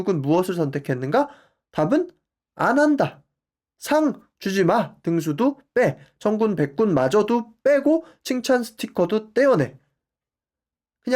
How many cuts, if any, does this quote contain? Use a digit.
1